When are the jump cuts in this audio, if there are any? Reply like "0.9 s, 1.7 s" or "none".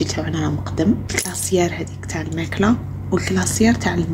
1.1 s